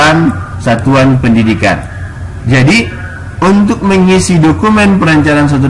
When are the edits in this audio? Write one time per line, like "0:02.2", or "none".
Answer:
none